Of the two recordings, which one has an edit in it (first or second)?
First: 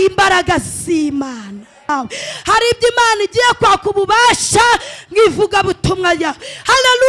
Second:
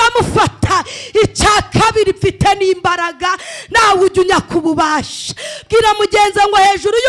first